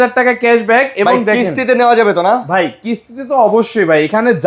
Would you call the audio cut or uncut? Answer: uncut